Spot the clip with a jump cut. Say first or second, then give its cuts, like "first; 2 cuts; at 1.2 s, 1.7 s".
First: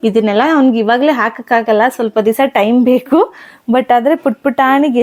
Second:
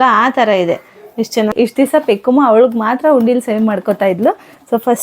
second; 1 cut; at 1.5 s